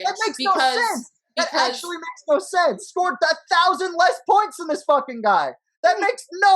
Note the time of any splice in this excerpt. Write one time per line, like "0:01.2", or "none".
0:02.8